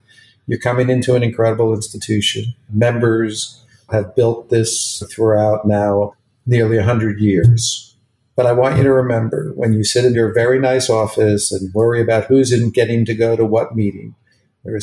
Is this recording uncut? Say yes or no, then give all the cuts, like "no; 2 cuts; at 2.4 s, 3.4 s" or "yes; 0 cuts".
yes; 0 cuts